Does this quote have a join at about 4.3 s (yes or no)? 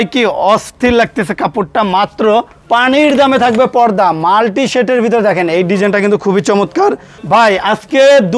no